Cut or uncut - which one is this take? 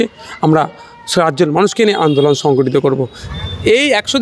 cut